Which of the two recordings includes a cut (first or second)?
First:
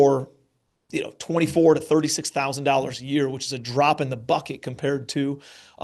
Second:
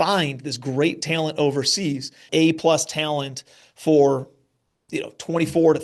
second